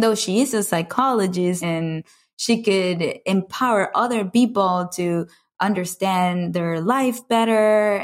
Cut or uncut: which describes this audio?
cut